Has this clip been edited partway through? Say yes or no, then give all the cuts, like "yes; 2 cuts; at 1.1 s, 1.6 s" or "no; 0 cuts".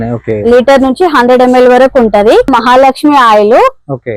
yes; 1 cut; at 2.5 s